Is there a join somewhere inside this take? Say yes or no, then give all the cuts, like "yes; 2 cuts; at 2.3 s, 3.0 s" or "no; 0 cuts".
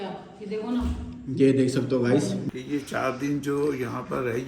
yes; 1 cut; at 2.5 s